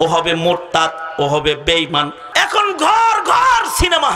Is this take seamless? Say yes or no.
no